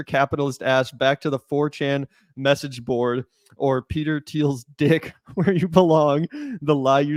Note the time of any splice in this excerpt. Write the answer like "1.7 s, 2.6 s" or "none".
none